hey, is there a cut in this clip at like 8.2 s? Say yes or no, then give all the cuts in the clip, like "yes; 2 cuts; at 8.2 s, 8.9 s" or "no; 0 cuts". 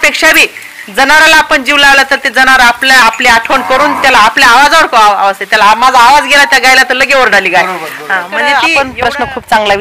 yes; 1 cut; at 8.2 s